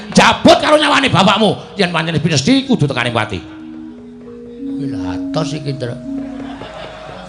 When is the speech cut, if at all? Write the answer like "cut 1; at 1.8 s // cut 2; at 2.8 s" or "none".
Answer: none